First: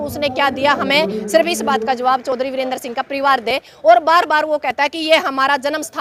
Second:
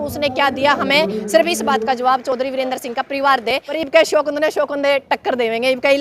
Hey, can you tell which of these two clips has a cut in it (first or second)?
second